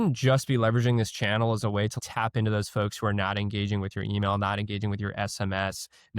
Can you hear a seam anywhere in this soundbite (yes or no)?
yes